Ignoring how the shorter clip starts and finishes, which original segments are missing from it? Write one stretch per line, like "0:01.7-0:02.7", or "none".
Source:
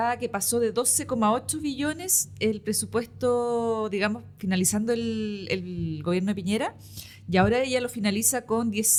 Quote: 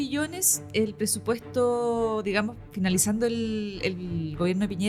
none

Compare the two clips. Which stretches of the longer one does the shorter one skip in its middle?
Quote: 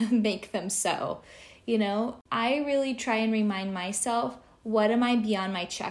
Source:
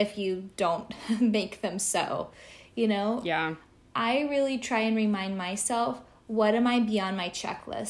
0:03.2-0:03.8

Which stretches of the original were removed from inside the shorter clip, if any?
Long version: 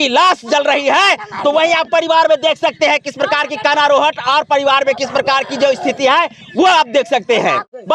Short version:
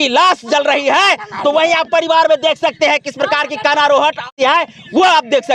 0:04.3-0:05.9

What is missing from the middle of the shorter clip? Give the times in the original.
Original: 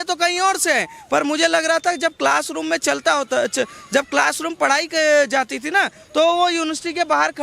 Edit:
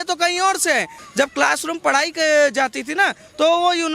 0:01.0-0:03.8

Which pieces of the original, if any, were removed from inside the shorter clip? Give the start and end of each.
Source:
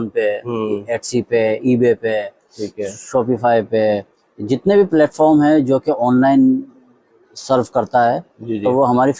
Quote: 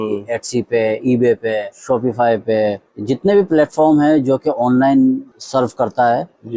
0:02.3-0:03.0
0:04.1-0:04.3
0:06.8-0:07.3

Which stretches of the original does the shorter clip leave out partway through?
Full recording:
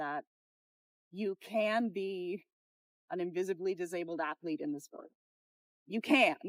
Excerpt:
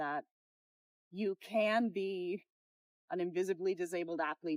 none

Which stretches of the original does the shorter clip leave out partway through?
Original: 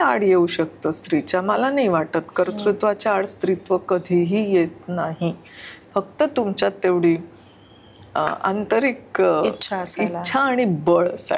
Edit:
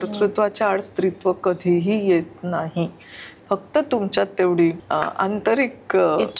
0:07.3-0:08.1

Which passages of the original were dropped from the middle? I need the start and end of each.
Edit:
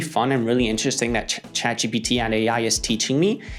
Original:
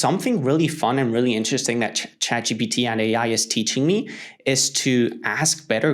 none

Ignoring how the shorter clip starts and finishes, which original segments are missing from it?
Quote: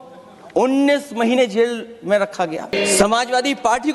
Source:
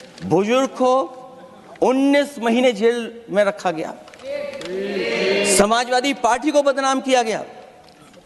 0:04.0-0:05.3

